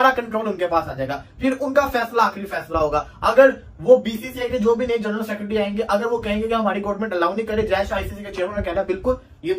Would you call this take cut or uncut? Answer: uncut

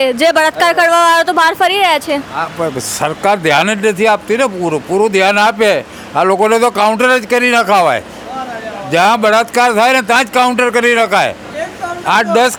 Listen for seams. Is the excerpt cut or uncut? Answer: uncut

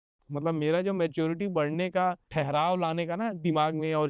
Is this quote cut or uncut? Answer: cut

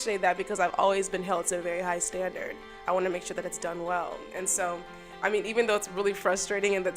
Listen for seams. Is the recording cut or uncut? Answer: cut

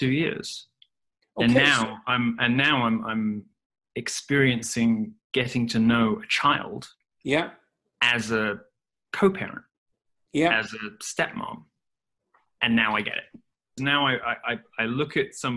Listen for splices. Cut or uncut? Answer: cut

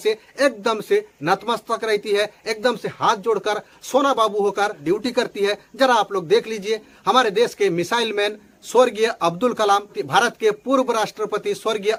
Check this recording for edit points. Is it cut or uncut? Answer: uncut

